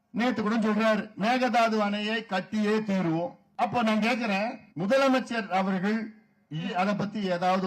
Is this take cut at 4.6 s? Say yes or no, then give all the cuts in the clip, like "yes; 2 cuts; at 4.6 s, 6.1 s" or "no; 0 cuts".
yes; 4 cuts; at 1.1 s, 3.4 s, 4.6 s, 6.7 s